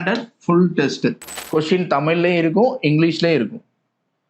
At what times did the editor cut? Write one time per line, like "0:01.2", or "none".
0:01.3

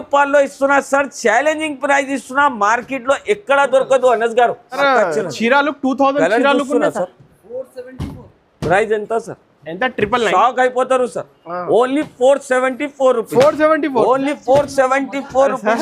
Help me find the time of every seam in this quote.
0:04.8

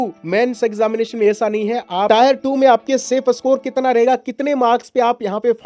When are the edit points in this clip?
0:02.1

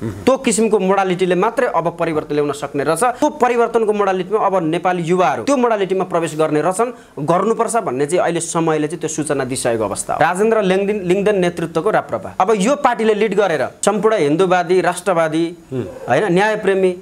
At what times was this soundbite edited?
0:03.2
0:05.4
0:10.2
0:12.3
0:13.7

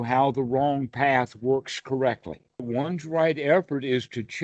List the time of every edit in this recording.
0:02.7

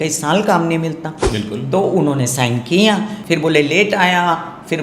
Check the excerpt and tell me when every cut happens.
0:03.1

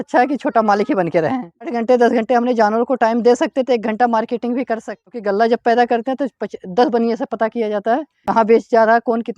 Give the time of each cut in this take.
0:01.8
0:05.0
0:08.1

